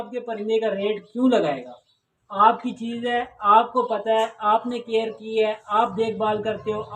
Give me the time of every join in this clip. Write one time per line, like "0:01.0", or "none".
none